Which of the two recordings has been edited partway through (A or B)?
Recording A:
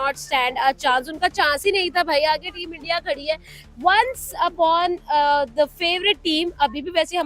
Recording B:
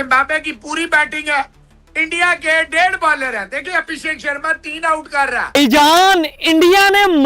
B